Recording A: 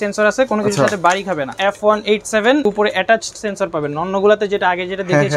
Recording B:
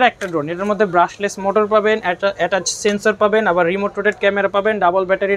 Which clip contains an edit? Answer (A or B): A